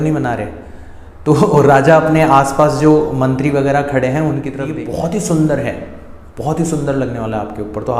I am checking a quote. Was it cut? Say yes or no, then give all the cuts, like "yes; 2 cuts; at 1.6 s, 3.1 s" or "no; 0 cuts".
yes; 1 cut; at 4.8 s